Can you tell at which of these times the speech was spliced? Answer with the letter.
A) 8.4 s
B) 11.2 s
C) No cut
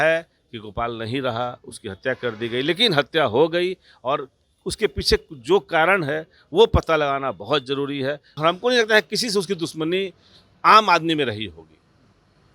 A